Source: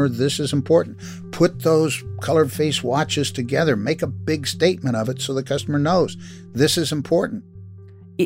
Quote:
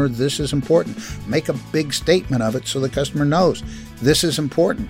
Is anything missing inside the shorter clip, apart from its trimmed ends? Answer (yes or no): yes